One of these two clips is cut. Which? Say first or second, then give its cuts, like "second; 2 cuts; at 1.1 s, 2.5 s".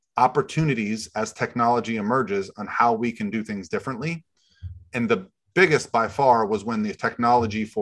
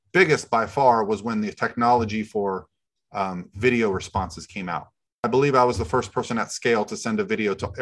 second; 1 cut; at 5.3 s